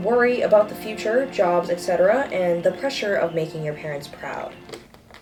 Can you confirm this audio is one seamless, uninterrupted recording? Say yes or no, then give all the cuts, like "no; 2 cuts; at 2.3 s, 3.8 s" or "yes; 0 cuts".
yes; 0 cuts